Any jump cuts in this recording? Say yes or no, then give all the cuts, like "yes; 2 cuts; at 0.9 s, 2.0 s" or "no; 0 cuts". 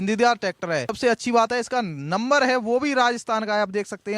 yes; 1 cut; at 0.9 s